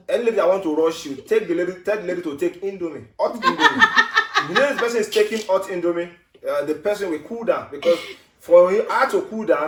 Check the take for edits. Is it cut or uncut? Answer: uncut